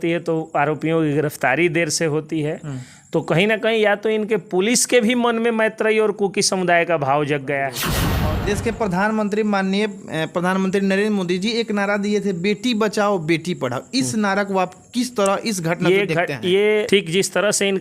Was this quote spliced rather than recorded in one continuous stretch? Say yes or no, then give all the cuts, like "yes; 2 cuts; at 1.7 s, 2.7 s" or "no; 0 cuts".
yes; 2 cuts; at 8.0 s, 16.9 s